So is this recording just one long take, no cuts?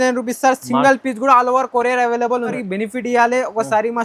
no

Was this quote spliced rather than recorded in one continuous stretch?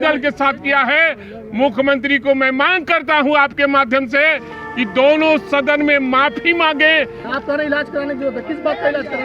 yes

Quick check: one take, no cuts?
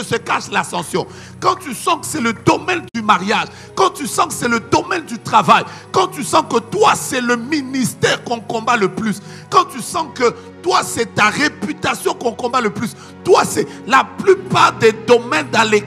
yes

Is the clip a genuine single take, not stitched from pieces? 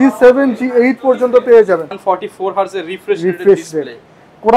no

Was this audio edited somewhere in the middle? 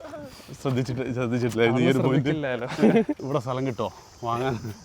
yes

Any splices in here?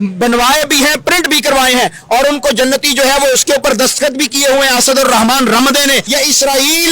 yes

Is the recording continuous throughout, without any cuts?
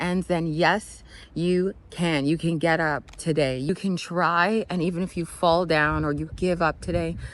no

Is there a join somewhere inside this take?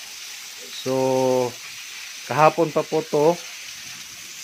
no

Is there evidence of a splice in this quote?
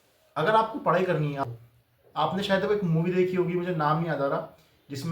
yes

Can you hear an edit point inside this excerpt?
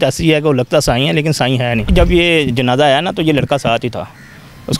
yes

